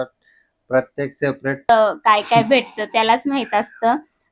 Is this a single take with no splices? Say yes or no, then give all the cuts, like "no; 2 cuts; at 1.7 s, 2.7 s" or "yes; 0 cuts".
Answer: no; 1 cut; at 1.7 s